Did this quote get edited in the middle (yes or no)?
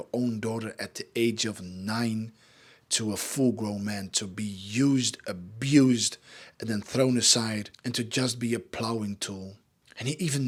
no